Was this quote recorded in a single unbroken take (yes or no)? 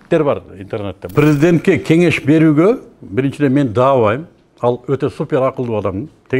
no